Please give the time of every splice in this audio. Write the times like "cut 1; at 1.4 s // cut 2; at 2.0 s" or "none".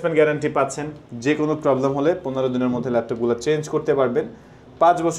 none

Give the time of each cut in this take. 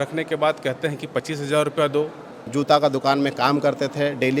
cut 1; at 2.5 s

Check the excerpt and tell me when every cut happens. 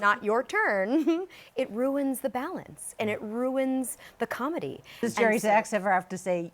cut 1; at 5.0 s

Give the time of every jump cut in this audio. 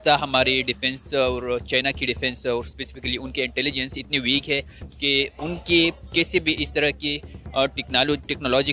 none

